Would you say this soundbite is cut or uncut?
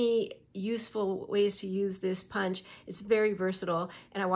uncut